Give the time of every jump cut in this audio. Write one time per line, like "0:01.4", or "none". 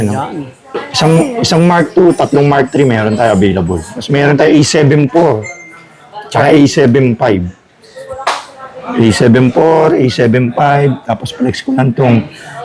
0:04.0